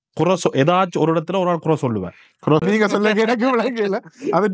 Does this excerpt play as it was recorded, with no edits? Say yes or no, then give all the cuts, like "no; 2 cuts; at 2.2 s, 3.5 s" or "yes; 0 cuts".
no; 1 cut; at 2.6 s